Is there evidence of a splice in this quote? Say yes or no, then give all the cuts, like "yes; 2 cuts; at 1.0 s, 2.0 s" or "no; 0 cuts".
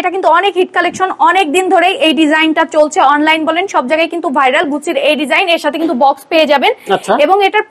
no; 0 cuts